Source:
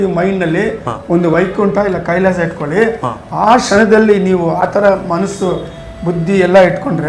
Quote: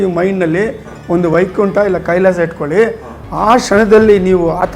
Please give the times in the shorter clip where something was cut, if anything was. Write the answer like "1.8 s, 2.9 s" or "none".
none